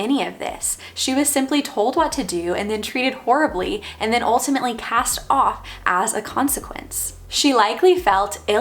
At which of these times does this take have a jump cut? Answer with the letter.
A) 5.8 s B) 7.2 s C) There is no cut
B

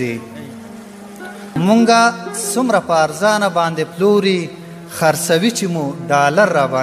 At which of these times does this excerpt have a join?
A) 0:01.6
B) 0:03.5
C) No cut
A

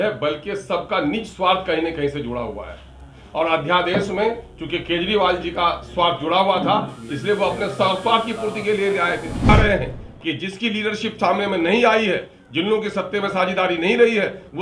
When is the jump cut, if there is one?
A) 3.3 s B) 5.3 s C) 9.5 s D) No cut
C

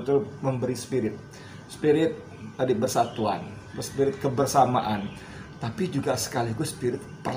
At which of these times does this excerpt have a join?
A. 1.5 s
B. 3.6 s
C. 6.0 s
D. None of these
B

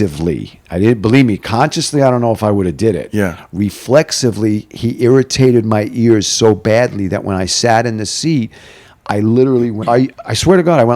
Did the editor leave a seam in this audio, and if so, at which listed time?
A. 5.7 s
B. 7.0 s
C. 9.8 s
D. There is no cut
C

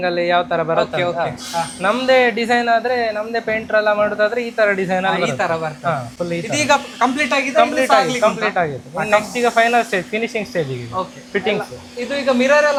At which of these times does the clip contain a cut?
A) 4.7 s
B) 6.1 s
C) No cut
C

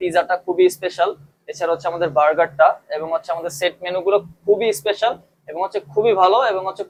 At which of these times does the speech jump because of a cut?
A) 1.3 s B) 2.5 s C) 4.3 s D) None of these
D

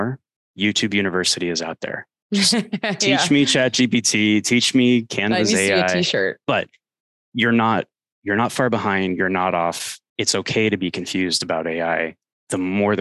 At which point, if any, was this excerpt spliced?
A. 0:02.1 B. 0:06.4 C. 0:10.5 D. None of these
B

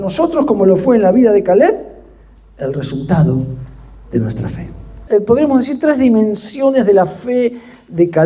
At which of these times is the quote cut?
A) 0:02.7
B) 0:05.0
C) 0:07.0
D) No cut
B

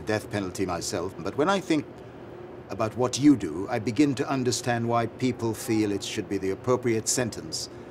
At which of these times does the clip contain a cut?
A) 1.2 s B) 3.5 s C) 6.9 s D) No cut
A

